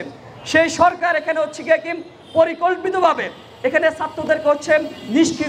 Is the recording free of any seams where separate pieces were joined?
yes; 0 cuts

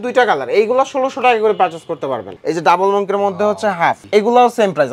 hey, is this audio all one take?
no; 1 cut; at 2.2 s

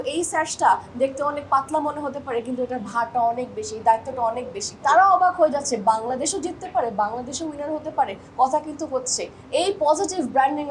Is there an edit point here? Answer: yes; 1 cut; at 4.7 s

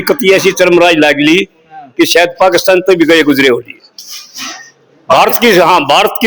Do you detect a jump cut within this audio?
no; 0 cuts

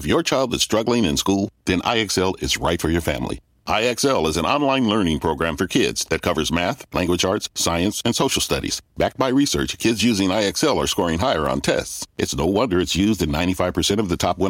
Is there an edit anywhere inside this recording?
no; 0 cuts

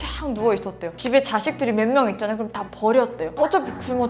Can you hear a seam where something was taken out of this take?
yes; 1 cut; at 1.0 s

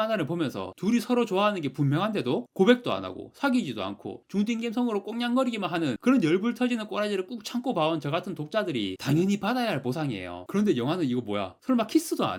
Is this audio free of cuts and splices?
yes; 0 cuts

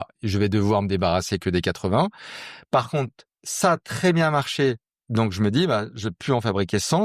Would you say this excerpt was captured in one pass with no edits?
yes; 0 cuts

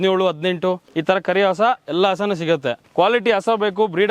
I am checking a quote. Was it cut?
yes; 2 cuts; at 0.9 s, 2.8 s

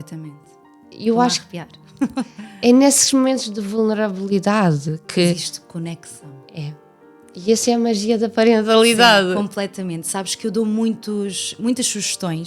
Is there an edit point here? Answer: no; 0 cuts

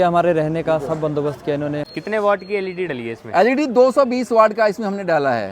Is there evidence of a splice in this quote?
yes; 1 cut; at 1.9 s

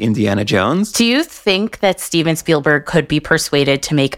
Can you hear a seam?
no; 0 cuts

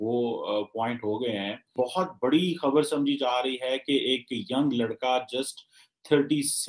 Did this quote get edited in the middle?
yes; 1 cut; at 1.7 s

